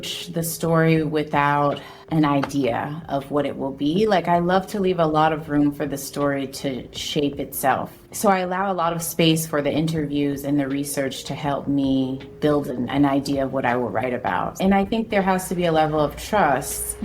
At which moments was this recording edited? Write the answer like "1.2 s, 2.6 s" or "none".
1.9 s, 8.0 s, 12.7 s, 14.6 s